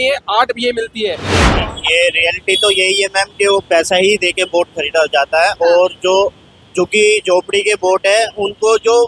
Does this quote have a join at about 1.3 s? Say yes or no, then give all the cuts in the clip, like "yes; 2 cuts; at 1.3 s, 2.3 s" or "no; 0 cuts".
yes; 1 cut; at 1.3 s